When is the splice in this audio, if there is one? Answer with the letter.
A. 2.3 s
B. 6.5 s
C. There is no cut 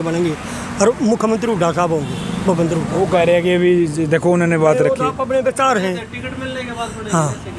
C